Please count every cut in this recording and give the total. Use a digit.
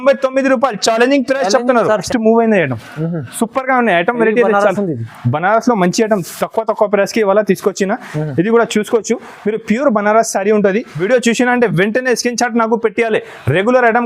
2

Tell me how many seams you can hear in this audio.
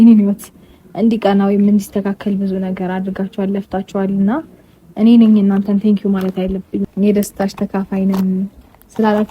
1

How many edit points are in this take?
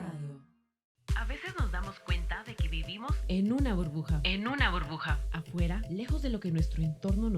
1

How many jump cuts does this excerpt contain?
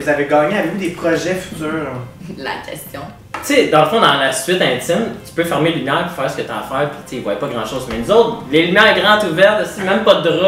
1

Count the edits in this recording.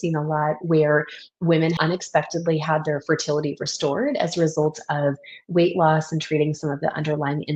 1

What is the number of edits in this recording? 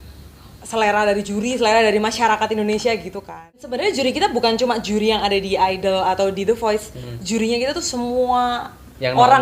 1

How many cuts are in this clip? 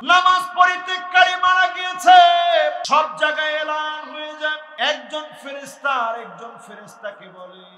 2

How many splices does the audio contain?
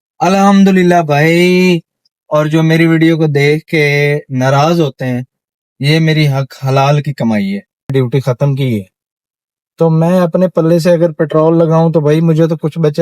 1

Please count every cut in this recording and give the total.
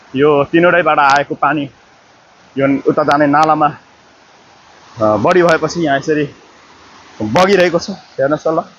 0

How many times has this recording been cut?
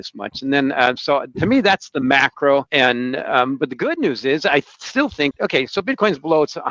2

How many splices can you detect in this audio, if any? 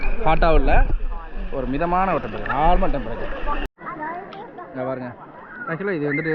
1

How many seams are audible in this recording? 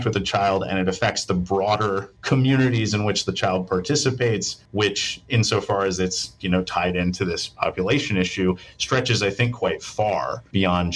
0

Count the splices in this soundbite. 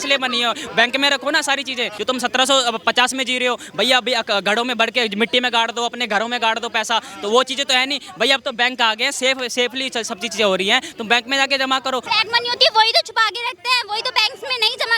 2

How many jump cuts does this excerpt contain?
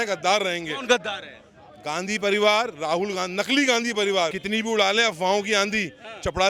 1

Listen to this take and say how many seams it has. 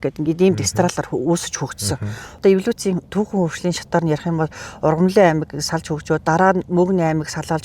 1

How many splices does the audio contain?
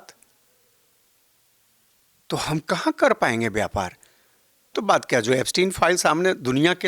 1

